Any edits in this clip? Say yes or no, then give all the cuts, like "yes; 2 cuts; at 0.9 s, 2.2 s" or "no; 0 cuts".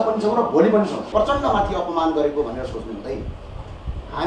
yes; 1 cut; at 1.1 s